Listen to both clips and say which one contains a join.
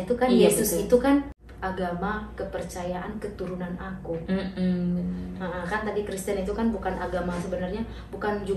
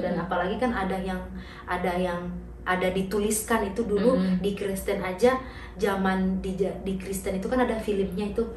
first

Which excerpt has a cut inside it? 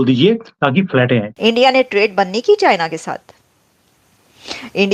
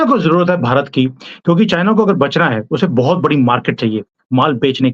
first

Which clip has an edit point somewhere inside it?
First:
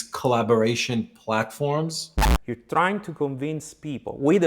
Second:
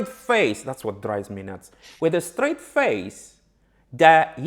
first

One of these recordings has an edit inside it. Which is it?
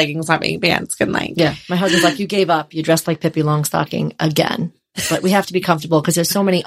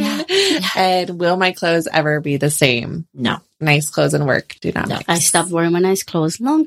second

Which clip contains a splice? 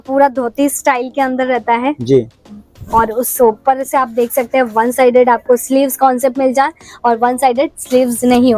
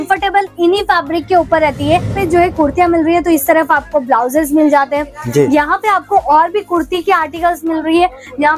second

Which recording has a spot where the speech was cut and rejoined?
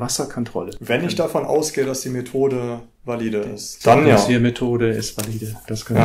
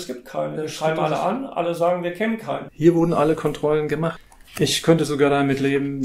second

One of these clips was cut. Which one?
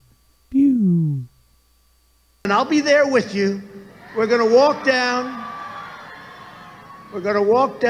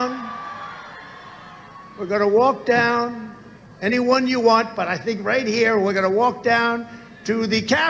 first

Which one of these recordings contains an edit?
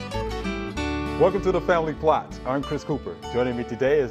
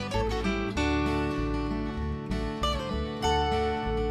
first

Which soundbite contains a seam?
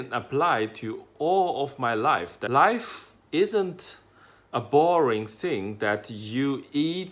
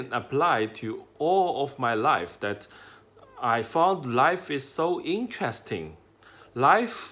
first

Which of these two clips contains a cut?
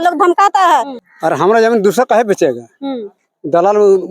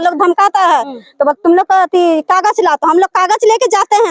first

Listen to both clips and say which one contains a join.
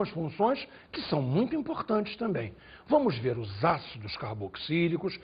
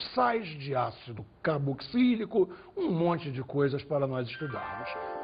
first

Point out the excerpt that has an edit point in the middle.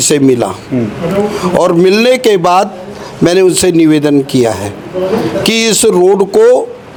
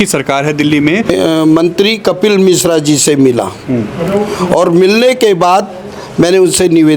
second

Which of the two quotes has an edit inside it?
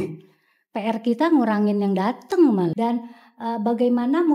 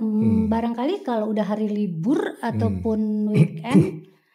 first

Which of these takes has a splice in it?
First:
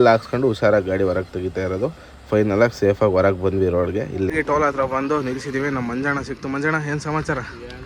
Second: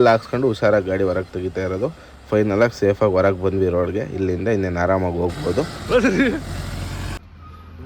first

